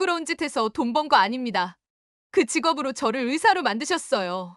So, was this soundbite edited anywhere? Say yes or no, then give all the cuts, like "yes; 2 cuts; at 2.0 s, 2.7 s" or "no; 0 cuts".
no; 0 cuts